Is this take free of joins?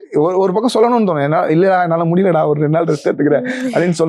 yes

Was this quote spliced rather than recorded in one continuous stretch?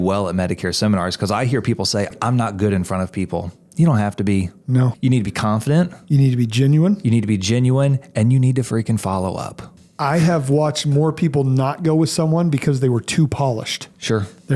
yes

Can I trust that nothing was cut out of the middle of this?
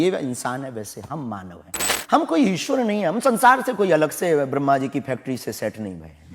no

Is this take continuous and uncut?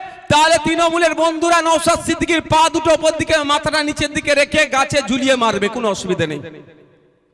yes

